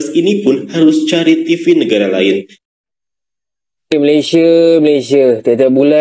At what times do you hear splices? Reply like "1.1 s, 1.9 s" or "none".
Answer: 2.6 s